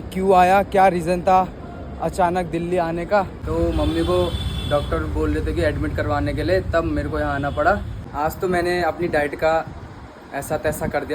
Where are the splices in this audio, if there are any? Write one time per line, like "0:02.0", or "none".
0:03.4
0:08.0